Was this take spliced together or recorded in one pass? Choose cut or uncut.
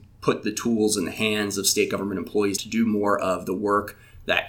cut